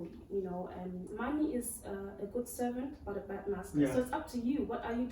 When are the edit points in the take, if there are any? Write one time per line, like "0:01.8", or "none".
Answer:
0:01.1